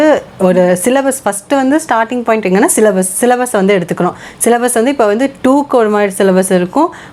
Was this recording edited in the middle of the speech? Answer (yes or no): no